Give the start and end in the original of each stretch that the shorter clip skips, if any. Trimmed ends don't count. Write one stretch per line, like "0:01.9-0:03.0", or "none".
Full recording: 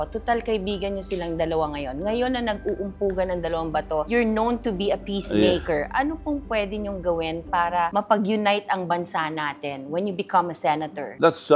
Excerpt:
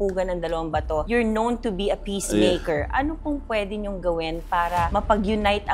none